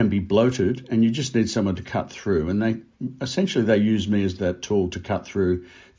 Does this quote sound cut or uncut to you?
uncut